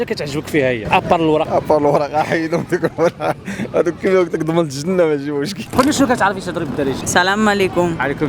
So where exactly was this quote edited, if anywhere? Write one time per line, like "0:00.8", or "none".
0:01.5
0:05.7
0:07.0